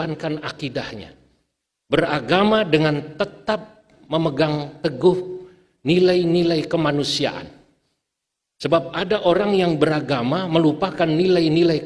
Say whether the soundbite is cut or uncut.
uncut